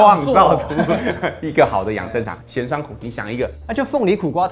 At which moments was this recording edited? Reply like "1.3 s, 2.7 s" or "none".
2.4 s, 3.6 s